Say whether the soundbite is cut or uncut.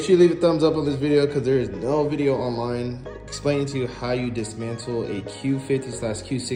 uncut